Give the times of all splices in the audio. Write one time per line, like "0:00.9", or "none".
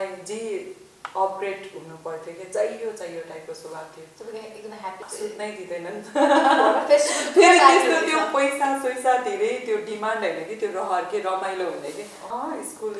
0:05.0
0:12.2